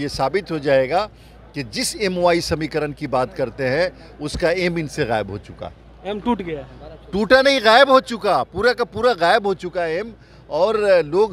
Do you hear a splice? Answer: no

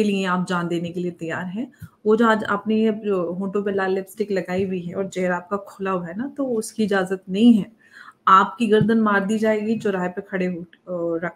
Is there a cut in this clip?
no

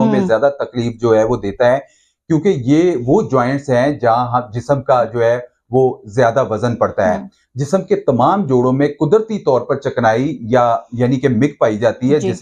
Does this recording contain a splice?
no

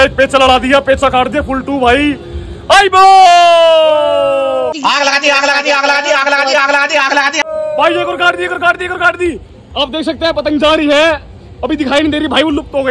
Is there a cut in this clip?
no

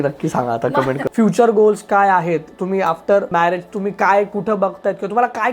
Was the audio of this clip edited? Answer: yes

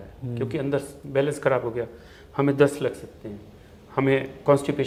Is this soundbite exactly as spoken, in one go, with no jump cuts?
yes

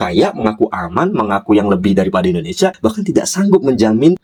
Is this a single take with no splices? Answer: yes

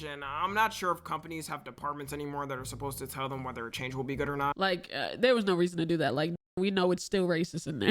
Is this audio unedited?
no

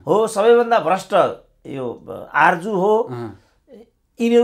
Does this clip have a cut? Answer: no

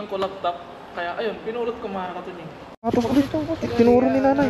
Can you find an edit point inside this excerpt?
yes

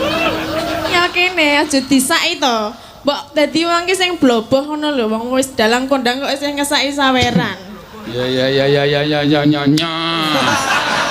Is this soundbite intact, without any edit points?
no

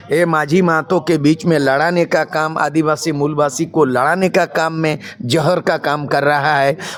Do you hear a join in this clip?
no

